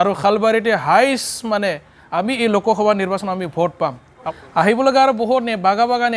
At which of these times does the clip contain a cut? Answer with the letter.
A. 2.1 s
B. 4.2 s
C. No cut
B